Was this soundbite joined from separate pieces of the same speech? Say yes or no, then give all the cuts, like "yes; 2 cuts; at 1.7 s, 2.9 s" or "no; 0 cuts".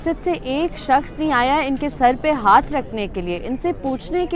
no; 0 cuts